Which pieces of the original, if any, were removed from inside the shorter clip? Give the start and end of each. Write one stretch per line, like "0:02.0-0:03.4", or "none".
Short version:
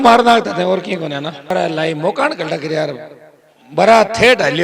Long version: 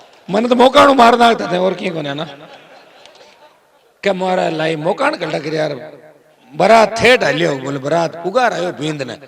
0:02.4-0:04.3